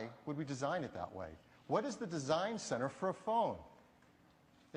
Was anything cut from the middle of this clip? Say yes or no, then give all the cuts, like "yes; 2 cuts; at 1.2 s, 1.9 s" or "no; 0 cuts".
no; 0 cuts